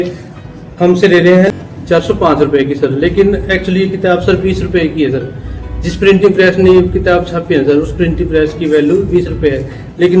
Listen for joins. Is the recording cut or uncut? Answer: cut